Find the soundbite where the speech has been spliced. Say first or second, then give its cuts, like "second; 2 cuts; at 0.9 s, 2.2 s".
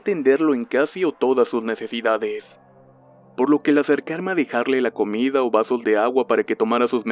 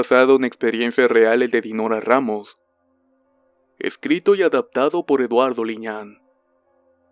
first; 1 cut; at 4.4 s